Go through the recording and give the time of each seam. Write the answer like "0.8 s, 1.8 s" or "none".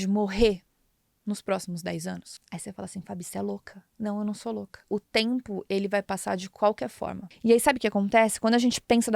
2.3 s, 4.8 s, 7.2 s

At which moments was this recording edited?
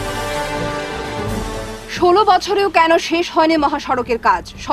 1.4 s

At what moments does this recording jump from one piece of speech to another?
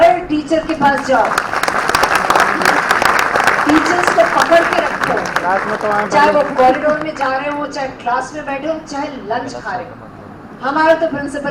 none

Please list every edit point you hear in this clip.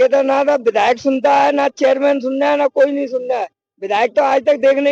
none

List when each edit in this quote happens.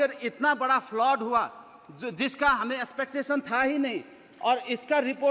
none

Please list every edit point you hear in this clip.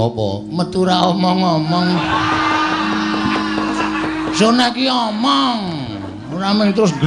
none

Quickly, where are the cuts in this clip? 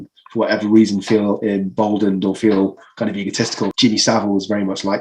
3.7 s

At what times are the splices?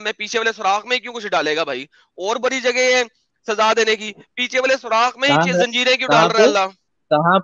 none

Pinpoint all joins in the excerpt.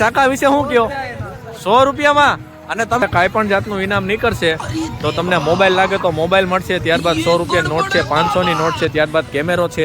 3.0 s

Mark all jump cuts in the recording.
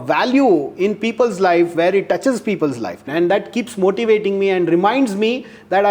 3.1 s

